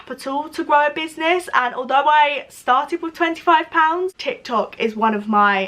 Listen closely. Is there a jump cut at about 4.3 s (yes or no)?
yes